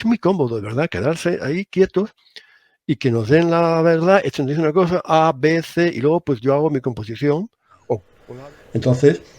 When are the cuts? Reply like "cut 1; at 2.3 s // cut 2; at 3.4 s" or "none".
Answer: cut 1; at 8.1 s